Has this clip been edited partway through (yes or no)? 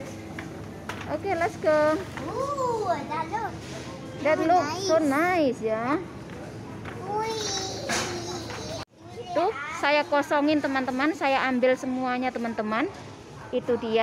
yes